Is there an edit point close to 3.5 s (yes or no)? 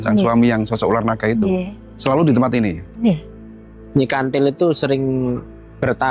yes